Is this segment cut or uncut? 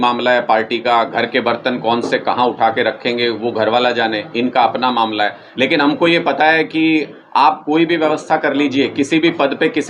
uncut